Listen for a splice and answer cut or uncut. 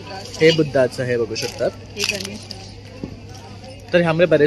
uncut